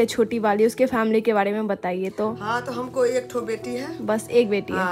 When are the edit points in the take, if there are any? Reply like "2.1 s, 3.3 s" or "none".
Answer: none